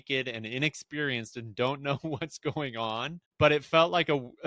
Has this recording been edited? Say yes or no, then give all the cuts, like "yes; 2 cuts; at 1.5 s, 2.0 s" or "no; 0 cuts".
yes; 1 cut; at 3.2 s